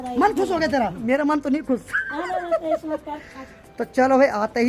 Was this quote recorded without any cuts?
yes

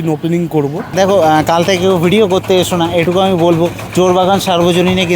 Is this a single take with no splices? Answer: no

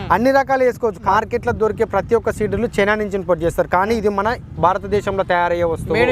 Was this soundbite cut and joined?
yes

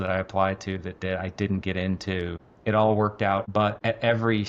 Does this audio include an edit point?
yes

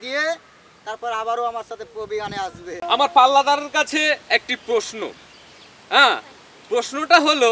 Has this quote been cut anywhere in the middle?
yes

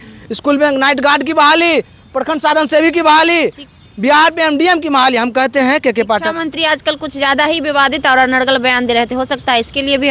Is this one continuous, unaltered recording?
yes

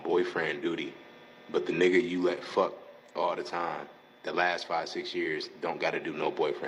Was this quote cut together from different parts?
no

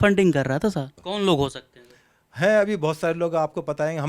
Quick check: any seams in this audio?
yes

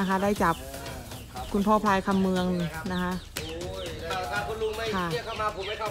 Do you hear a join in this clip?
yes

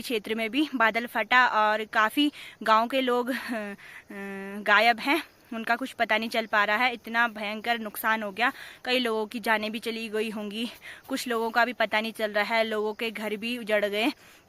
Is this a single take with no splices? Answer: yes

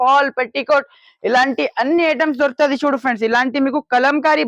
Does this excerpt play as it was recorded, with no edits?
yes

